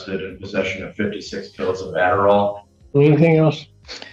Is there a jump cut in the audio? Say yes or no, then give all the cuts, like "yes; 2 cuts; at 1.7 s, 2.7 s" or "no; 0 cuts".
no; 0 cuts